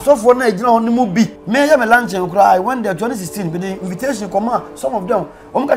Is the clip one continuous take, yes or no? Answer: no